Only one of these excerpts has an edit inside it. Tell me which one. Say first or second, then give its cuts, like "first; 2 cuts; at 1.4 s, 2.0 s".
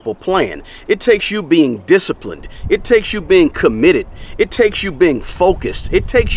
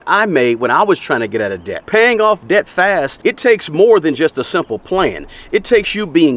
second; 2 cuts; at 1.7 s, 3.1 s